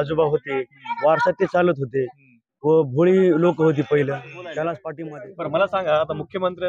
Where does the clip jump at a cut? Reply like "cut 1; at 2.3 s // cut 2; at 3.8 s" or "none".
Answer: cut 1; at 4.9 s

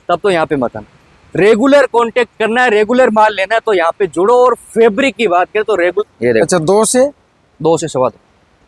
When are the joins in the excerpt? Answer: cut 1; at 6.0 s

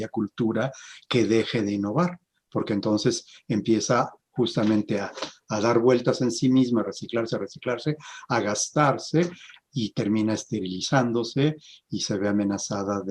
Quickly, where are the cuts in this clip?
none

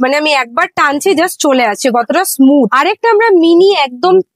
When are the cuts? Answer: none

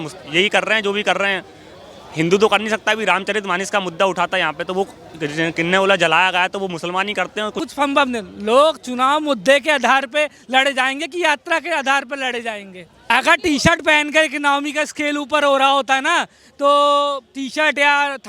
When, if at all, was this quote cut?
cut 1; at 7.6 s // cut 2; at 12.9 s

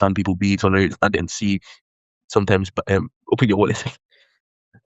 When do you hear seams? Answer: none

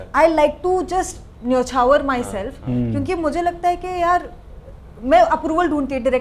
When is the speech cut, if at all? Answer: none

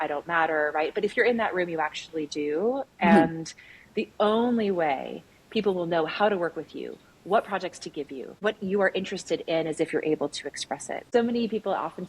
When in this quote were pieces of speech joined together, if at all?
cut 1; at 8.4 s // cut 2; at 11.1 s

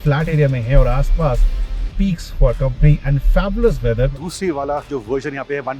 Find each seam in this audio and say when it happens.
cut 1; at 4.1 s

